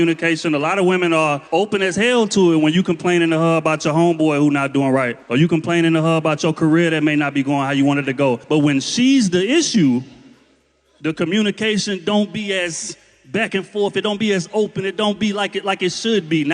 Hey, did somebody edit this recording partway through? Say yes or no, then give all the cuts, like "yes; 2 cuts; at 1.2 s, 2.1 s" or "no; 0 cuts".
no; 0 cuts